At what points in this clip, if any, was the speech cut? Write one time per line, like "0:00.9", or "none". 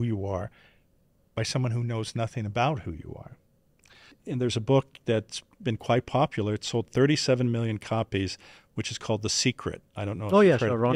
0:04.2